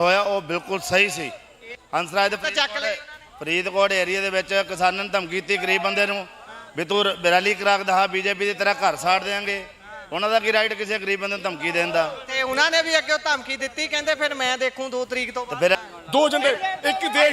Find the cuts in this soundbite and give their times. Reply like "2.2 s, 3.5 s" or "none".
1.7 s, 15.8 s